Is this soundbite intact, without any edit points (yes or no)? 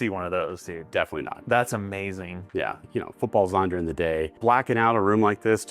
no